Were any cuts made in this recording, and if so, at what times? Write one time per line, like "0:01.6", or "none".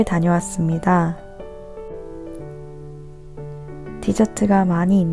none